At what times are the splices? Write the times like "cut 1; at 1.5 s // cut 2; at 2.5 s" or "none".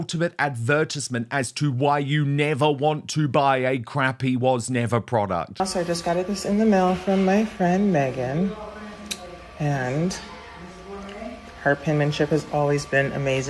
cut 1; at 5.6 s